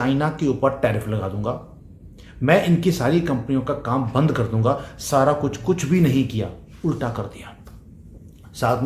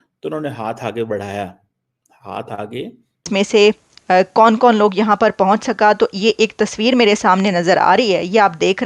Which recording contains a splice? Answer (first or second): second